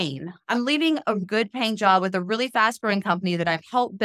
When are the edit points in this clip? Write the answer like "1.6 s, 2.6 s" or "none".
1.3 s